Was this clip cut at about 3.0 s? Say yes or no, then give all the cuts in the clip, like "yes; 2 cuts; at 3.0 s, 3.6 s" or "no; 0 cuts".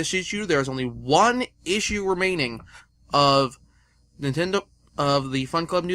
yes; 1 cut; at 3.0 s